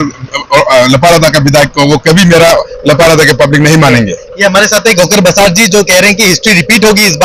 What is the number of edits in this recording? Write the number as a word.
zero